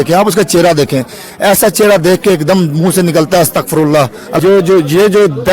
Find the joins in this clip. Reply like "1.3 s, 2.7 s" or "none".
4.2 s